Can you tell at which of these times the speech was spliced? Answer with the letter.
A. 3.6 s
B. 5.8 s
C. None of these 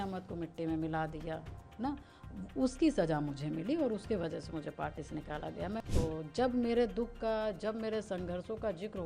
B